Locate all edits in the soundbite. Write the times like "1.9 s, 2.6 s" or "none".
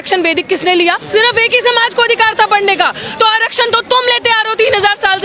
none